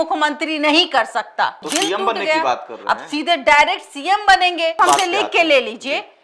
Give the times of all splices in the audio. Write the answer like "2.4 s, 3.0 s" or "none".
1.6 s, 4.8 s